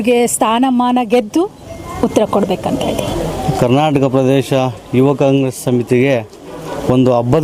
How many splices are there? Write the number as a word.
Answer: zero